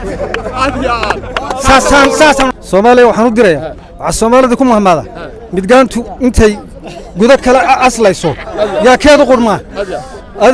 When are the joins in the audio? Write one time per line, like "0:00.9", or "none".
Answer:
0:02.5